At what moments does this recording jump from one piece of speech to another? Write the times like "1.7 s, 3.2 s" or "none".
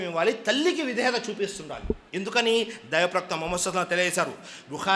none